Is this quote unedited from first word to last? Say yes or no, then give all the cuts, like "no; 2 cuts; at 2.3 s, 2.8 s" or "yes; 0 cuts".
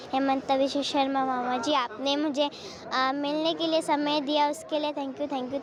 yes; 0 cuts